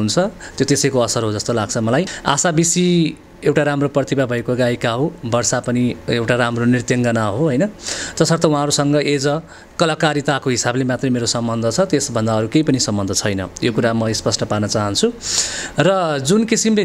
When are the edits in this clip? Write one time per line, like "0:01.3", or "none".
0:02.1